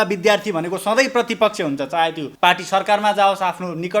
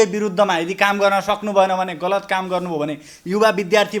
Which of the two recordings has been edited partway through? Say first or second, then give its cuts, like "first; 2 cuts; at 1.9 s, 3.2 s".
first; 1 cut; at 2.2 s